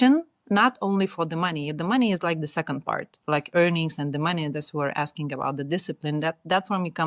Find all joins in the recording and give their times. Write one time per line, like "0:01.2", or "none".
none